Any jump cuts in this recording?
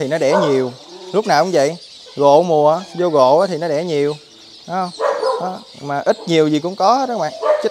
no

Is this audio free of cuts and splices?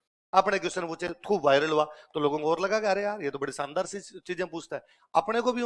yes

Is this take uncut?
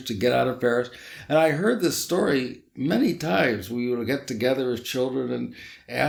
yes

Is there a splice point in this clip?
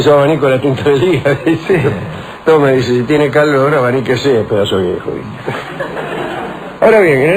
no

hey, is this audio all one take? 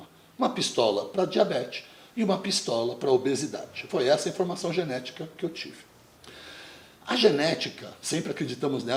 yes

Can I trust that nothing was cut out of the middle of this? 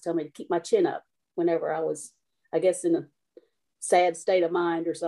yes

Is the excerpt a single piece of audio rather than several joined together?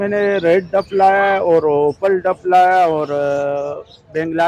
yes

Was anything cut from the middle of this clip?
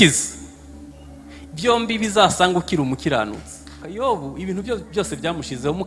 yes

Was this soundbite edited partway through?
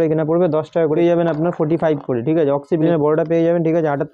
yes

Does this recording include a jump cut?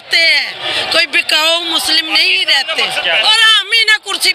yes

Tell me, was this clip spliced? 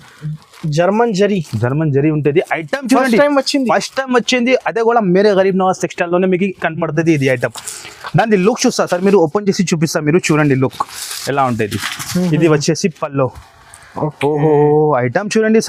no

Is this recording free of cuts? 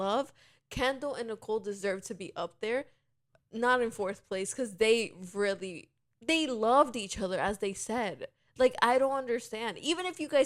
yes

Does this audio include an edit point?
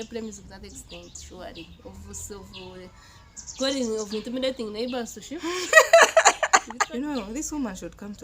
yes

